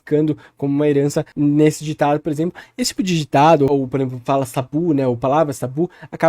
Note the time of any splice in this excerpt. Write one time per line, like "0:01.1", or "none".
0:01.3